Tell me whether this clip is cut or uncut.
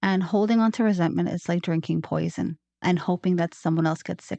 cut